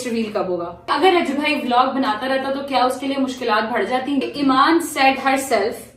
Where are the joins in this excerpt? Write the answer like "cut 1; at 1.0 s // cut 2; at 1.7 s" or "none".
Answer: cut 1; at 0.9 s // cut 2; at 4.2 s